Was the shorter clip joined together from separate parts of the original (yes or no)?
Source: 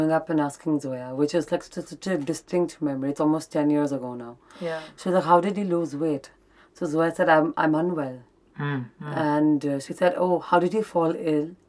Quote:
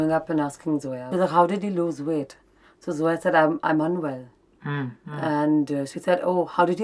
yes